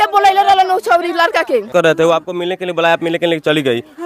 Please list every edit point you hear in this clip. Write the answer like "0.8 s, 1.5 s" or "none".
1.7 s